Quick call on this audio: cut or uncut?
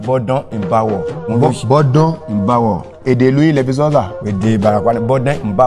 cut